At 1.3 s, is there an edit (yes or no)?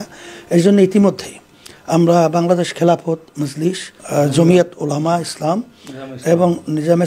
no